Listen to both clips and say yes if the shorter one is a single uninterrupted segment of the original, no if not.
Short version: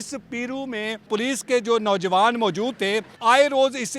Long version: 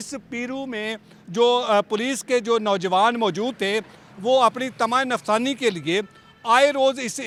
no